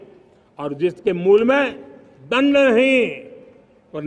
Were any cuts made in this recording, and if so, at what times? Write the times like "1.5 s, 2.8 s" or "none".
none